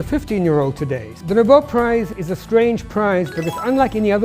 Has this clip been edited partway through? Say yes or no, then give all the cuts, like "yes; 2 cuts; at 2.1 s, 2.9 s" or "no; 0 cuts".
yes; 2 cuts; at 1.1 s, 2.1 s